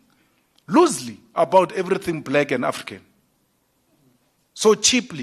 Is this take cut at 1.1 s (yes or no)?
no